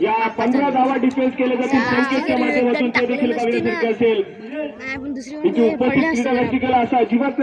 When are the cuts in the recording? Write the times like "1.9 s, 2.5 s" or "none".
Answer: none